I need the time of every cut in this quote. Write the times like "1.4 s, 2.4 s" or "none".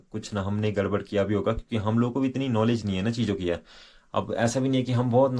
none